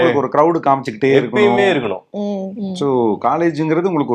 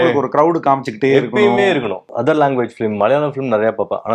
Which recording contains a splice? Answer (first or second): second